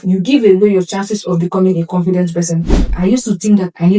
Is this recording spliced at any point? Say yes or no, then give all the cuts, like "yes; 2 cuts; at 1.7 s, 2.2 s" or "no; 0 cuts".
yes; 1 cut; at 2.9 s